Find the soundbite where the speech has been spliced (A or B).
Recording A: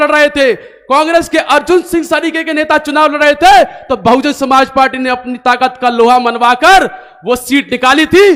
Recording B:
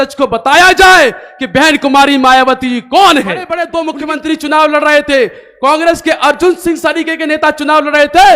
B